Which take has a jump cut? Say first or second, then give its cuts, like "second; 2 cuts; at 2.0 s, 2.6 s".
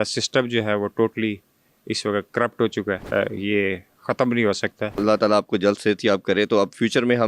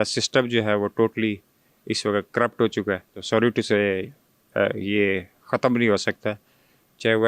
first; 2 cuts; at 3.0 s, 5.0 s